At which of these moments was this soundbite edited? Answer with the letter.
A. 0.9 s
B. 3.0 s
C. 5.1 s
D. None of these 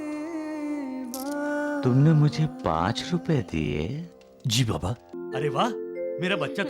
C